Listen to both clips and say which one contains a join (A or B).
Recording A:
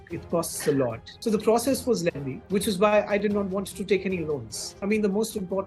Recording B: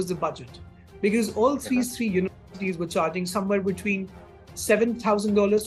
A